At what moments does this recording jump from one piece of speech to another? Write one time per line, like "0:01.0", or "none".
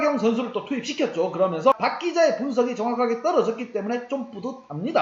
0:01.8